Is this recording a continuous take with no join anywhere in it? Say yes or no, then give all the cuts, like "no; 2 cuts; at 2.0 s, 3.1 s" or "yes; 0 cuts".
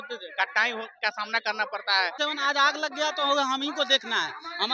no; 1 cut; at 2.1 s